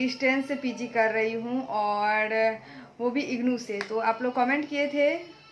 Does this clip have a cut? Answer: no; 0 cuts

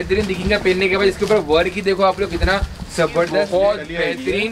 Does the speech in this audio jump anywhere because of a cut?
yes; 1 cut; at 3.4 s

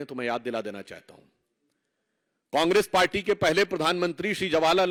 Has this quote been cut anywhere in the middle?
no; 0 cuts

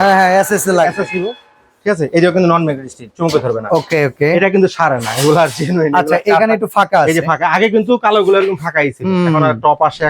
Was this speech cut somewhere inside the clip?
no; 0 cuts

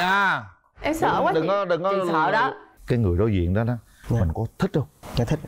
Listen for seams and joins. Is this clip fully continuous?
no; 1 cut; at 2.7 s

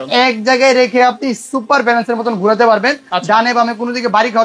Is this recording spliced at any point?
no; 0 cuts

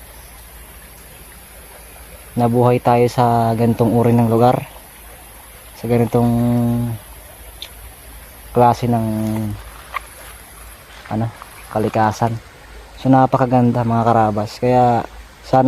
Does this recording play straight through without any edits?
yes; 0 cuts

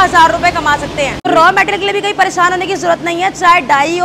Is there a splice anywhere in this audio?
yes; 1 cut; at 1.2 s

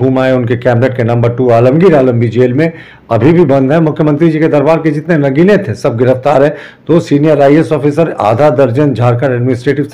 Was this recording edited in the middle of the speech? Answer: no; 0 cuts

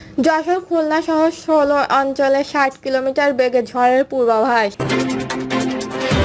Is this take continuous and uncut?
no; 1 cut; at 4.8 s

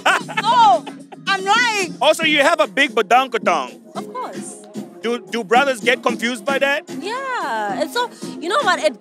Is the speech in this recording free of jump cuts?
no; 1 cut; at 1.9 s

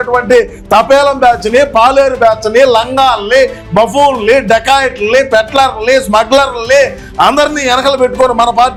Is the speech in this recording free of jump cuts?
yes; 0 cuts

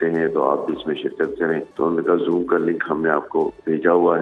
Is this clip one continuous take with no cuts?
no; 1 cut; at 1.7 s

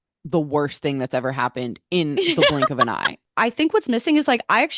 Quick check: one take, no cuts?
no; 1 cut; at 3.2 s

